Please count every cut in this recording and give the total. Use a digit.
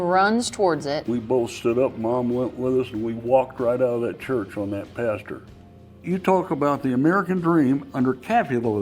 2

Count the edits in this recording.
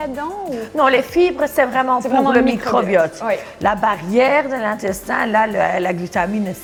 0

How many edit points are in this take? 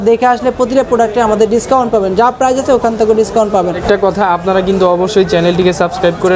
1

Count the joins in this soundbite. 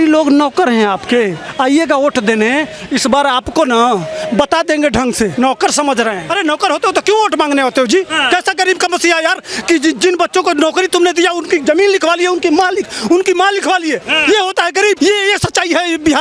5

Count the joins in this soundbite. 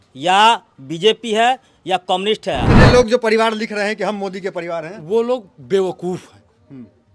1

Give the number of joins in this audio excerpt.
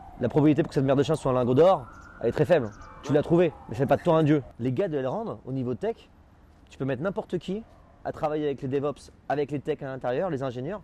1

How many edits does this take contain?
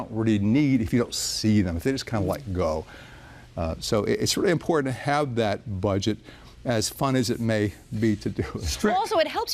0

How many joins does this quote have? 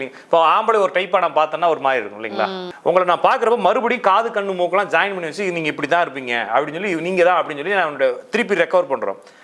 1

